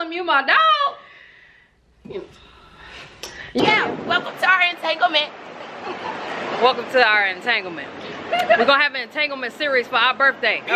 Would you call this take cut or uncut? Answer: cut